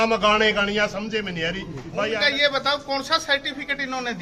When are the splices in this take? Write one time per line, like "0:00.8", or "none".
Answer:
0:02.1

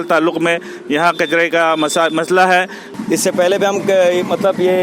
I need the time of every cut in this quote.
0:02.8

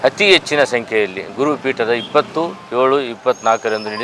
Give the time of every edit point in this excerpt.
none

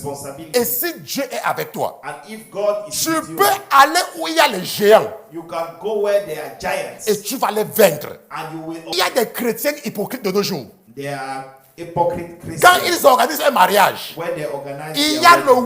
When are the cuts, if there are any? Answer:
0:08.9

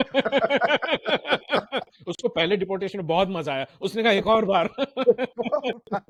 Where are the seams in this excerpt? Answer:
none

